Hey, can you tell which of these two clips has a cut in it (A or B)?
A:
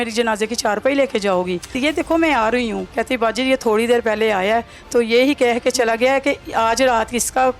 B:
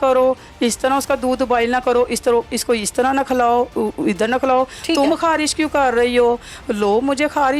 A